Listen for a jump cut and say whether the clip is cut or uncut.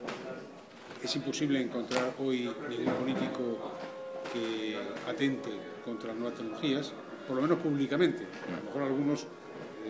cut